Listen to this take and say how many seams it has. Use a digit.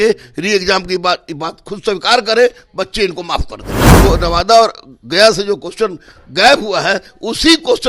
1